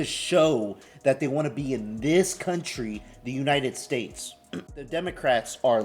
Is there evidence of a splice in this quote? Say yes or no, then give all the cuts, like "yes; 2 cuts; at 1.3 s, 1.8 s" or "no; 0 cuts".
yes; 1 cut; at 4.8 s